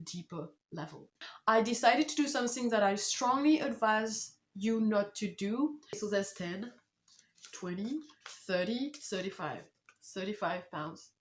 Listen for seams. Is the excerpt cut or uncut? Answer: cut